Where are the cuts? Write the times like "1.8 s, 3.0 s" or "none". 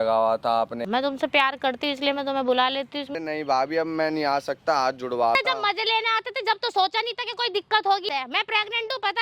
0.8 s, 3.1 s, 5.4 s, 8.1 s

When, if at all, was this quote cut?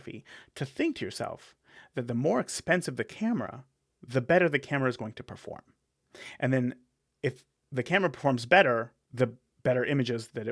9.0 s

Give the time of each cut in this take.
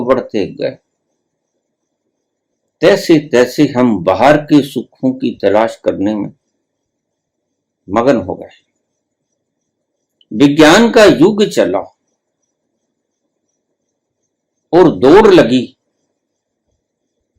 none

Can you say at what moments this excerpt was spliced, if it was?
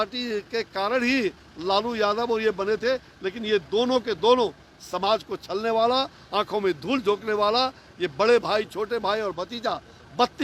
none

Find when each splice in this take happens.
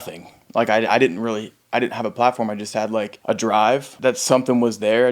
3.1 s, 3.9 s

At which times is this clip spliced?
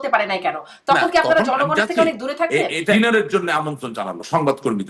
2.9 s

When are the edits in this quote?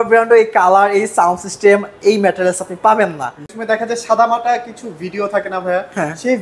3.5 s

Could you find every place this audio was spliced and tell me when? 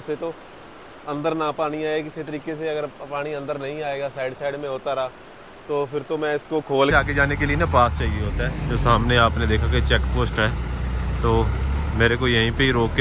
6.9 s

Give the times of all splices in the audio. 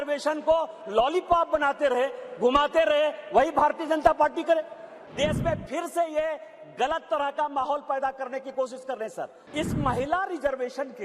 5.0 s, 9.4 s

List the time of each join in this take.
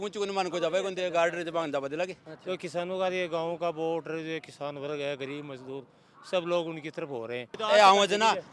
2.3 s, 7.5 s

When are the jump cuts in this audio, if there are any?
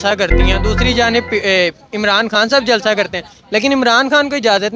none

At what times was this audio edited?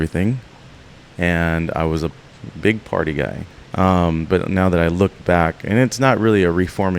3.5 s

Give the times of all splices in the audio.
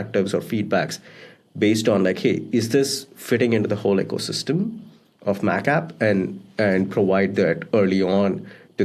none

